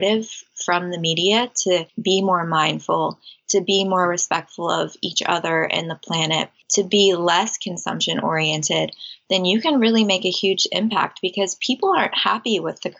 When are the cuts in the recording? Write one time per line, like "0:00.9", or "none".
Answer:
0:01.9
0:06.6